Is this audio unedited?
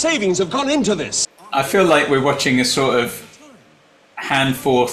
no; 1 cut; at 1.1 s

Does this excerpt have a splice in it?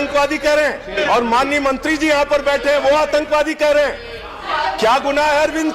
yes; 2 cuts; at 1.0 s, 4.4 s

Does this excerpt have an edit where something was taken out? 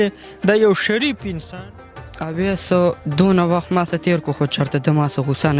yes; 1 cut; at 1.7 s

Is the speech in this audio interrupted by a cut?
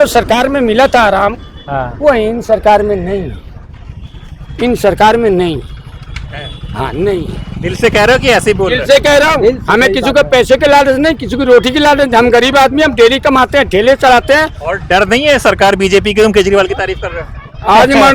no; 0 cuts

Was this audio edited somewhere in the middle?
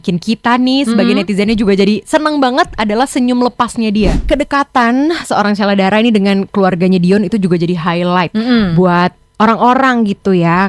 yes; 1 cut; at 4.2 s

